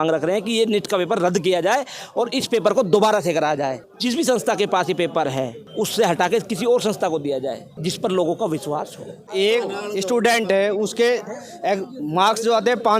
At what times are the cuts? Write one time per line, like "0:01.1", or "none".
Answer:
0:03.9
0:05.6
0:07.7
0:09.3